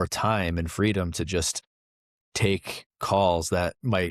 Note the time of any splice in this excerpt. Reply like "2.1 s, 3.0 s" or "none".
2.0 s